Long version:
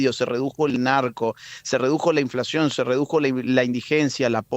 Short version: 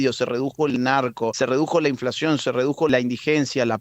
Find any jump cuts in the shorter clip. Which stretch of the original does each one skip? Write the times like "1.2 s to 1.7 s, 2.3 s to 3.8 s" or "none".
1.3 s to 1.7 s, 3.2 s to 3.5 s